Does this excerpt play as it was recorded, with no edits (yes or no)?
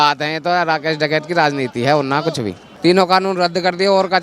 no